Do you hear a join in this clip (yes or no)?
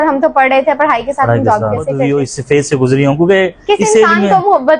yes